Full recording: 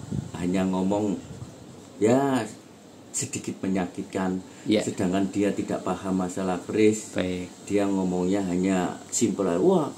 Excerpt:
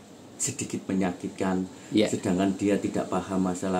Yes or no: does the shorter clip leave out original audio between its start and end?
no